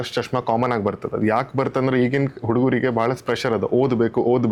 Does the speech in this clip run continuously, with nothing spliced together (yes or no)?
yes